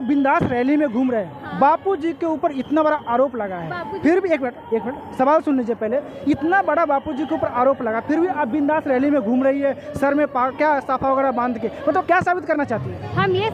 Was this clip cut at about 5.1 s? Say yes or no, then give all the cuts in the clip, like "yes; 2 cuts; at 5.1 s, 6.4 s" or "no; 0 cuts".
no; 0 cuts